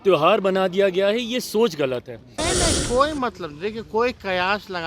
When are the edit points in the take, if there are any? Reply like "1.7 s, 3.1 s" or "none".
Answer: 2.4 s